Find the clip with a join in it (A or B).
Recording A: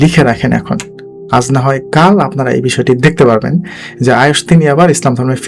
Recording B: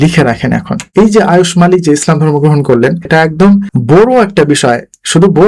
B